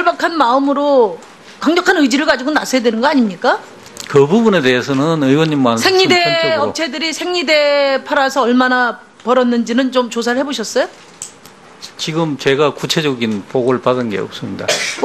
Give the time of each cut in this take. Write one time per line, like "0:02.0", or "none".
none